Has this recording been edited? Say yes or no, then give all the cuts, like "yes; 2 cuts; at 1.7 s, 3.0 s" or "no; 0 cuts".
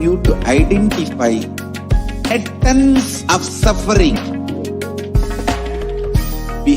yes; 2 cuts; at 2.3 s, 4.2 s